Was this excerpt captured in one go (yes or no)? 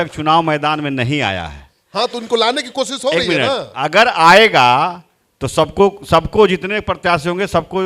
yes